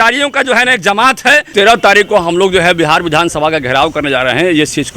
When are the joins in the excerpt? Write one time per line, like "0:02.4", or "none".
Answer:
0:01.5